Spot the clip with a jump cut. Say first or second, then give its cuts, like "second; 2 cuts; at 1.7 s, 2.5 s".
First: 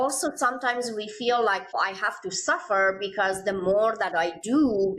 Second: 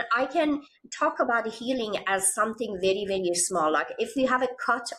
first; 1 cut; at 1.8 s